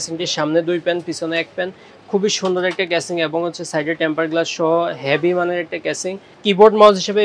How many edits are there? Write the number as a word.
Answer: one